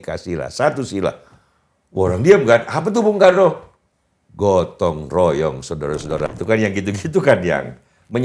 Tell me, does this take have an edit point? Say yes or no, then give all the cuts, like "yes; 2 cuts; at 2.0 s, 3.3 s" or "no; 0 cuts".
yes; 1 cut; at 6.3 s